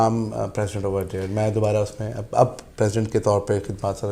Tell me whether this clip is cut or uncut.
uncut